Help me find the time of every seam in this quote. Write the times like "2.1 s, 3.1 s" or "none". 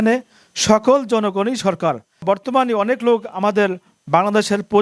2.2 s